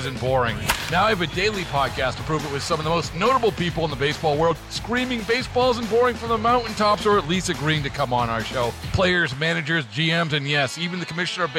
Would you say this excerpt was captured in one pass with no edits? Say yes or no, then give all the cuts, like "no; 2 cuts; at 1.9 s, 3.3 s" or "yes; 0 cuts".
yes; 0 cuts